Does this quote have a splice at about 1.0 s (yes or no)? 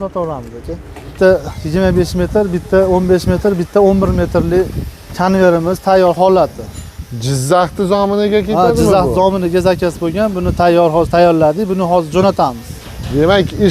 yes